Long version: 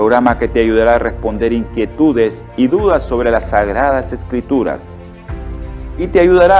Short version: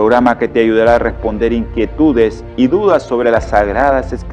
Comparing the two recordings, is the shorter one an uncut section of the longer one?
yes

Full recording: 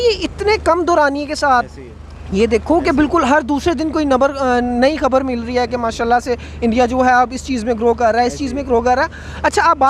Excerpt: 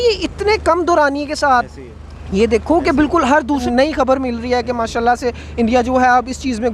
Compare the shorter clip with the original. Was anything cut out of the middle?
yes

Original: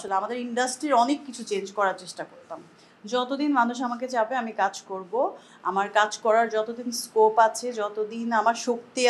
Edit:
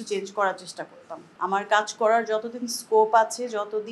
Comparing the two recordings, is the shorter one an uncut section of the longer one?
no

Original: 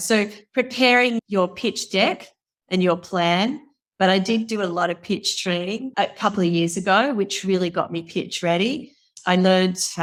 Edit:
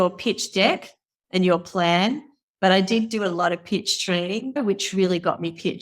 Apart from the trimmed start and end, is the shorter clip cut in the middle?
yes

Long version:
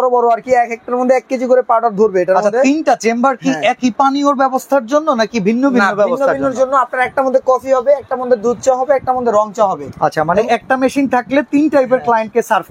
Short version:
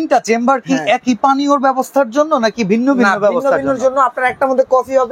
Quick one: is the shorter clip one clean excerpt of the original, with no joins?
yes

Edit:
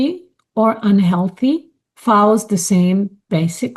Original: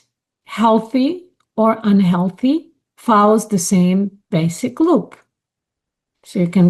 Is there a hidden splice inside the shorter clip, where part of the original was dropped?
no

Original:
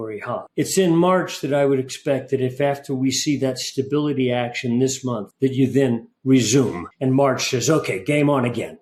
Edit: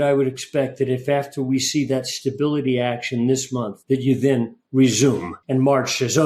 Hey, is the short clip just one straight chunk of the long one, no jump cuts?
yes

